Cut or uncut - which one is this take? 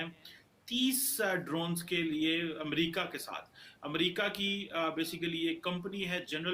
uncut